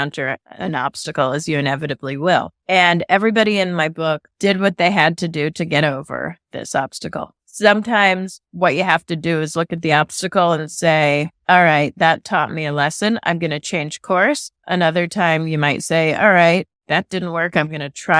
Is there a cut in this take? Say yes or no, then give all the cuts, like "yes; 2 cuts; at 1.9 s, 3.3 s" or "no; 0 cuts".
no; 0 cuts